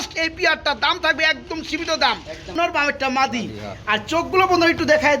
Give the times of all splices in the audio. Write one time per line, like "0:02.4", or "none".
0:02.5